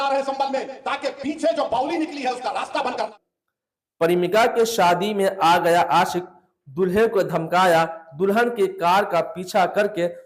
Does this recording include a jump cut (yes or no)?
yes